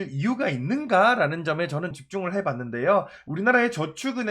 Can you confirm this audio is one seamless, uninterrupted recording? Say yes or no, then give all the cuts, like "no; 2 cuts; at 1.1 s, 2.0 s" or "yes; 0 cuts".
no; 2 cuts; at 2.0 s, 3.2 s